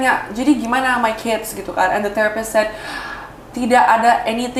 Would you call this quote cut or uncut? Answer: uncut